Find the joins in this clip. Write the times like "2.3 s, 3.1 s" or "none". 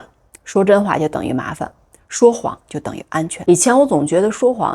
3.3 s